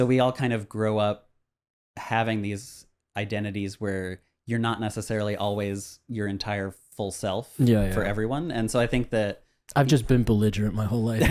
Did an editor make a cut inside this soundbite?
no; 0 cuts

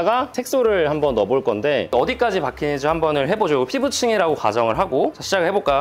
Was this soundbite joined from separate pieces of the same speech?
no; 0 cuts

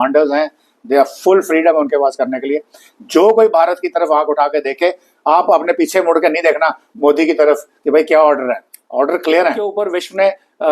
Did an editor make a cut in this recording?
yes; 1 cut; at 9.8 s

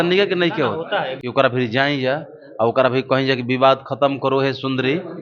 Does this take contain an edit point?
yes; 1 cut; at 1.2 s

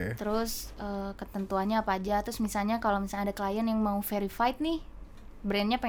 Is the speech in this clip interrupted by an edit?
no; 0 cuts

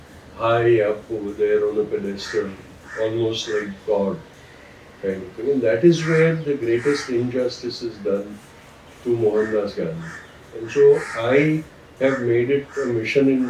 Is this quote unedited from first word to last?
yes; 0 cuts

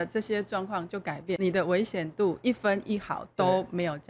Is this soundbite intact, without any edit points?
no; 1 cut; at 1.4 s

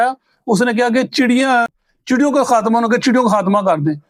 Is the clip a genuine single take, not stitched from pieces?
yes; 0 cuts

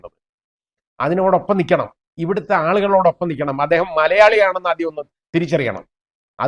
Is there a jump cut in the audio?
no; 0 cuts

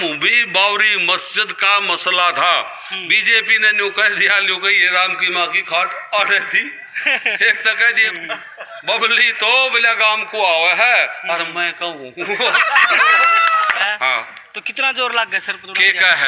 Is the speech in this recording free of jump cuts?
no; 2 cuts; at 8.1 s, 13.8 s

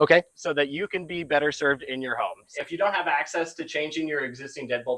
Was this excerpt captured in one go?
no; 1 cut; at 2.5 s

